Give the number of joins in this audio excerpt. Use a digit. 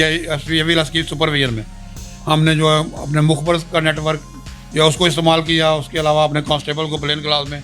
0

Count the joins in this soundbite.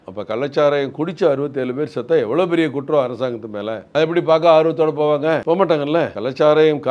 3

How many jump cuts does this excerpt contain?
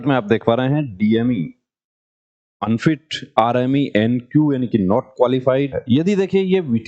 1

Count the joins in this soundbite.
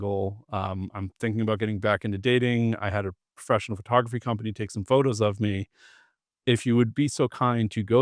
0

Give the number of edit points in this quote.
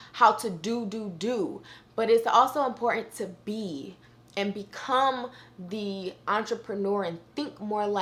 0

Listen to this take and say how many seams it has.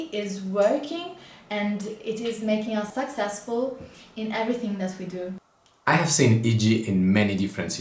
2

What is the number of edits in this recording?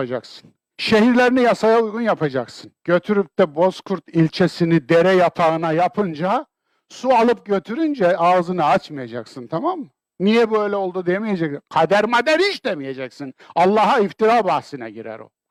0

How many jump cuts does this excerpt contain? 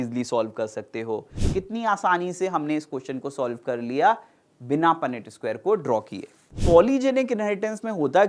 2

